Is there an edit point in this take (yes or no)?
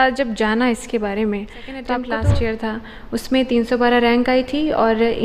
yes